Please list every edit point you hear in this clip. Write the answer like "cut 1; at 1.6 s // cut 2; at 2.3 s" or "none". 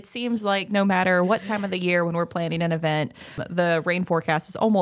cut 1; at 3.4 s

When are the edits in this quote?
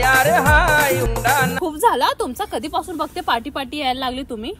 cut 1; at 1.5 s

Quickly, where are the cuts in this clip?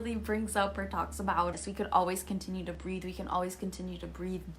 cut 1; at 1.5 s

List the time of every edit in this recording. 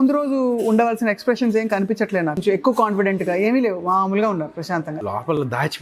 cut 1; at 2.4 s // cut 2; at 4.6 s

